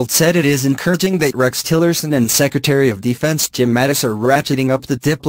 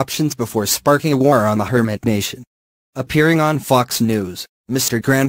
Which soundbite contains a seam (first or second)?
second